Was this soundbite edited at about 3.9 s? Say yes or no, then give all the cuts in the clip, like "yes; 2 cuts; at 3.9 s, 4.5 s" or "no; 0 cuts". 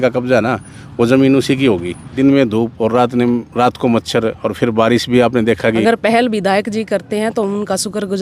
no; 2 cuts; at 2.0 s, 5.8 s